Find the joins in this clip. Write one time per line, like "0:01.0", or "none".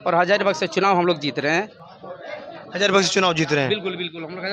none